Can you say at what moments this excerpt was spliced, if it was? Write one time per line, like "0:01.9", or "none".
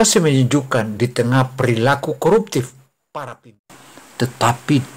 0:03.6